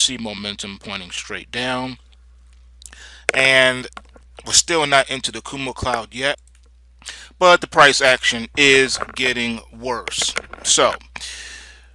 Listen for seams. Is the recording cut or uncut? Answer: uncut